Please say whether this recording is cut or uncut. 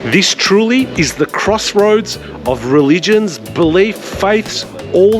cut